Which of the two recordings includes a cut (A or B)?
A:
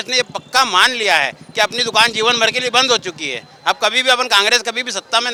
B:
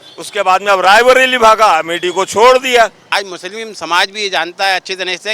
B